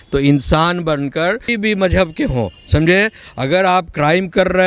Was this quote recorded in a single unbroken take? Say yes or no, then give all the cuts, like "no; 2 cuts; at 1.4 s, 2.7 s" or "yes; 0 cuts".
no; 1 cut; at 1.5 s